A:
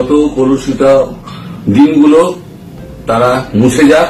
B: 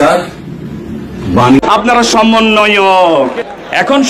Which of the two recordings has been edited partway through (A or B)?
B